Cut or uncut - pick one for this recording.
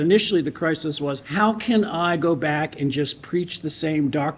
cut